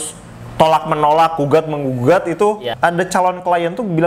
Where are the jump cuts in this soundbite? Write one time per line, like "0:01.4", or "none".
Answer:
0:02.6

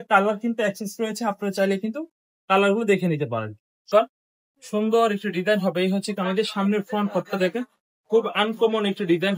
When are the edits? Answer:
0:03.8

